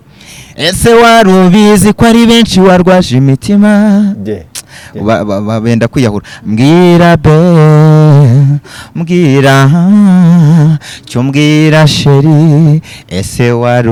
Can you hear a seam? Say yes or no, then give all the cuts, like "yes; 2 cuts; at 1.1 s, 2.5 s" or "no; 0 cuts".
no; 0 cuts